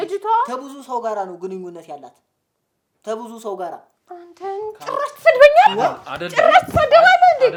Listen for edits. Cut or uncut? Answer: uncut